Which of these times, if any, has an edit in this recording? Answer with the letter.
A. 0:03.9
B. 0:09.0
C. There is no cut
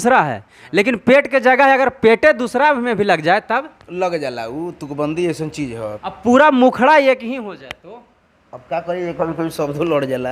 C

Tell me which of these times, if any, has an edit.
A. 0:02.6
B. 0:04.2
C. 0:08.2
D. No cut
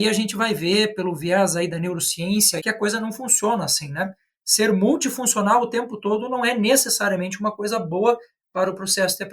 A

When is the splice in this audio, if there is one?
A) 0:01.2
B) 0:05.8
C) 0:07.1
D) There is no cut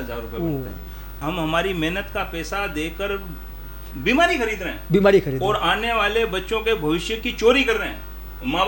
A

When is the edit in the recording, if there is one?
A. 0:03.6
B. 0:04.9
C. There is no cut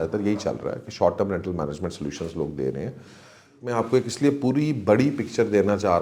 A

